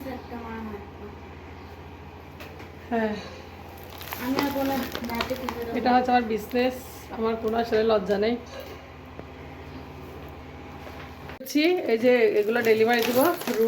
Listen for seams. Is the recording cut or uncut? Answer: cut